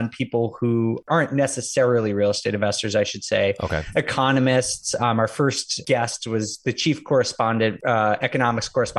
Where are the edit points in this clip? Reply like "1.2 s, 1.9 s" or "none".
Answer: 1.1 s, 5.8 s, 7.8 s